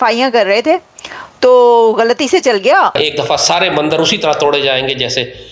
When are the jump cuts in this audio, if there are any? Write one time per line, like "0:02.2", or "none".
0:02.9